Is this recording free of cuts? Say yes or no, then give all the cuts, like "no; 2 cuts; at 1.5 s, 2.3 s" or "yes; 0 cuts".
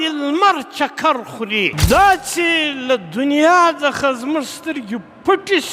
no; 1 cut; at 1.8 s